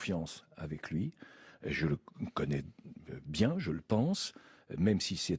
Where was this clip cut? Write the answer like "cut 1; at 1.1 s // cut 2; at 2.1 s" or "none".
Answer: cut 1; at 4.4 s